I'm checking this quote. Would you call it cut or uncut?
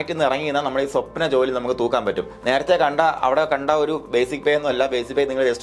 uncut